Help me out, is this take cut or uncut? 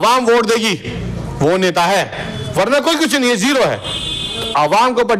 uncut